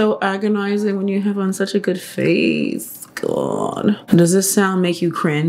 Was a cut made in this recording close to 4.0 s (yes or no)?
yes